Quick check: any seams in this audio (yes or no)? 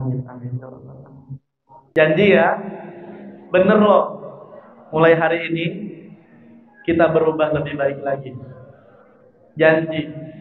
yes